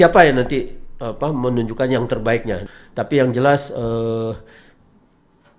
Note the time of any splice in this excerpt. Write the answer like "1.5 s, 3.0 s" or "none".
2.6 s